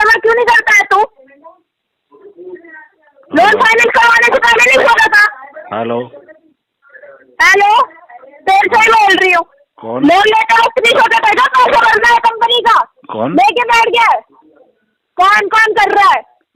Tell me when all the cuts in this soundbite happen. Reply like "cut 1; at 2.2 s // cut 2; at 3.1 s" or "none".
none